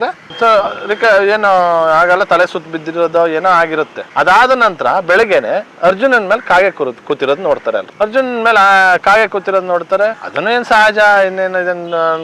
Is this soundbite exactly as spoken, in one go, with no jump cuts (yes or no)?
no